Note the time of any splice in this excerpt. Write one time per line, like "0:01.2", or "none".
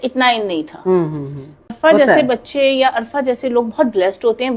0:01.7